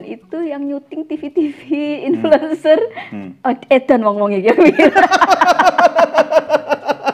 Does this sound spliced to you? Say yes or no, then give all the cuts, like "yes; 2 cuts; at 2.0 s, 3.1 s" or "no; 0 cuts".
no; 0 cuts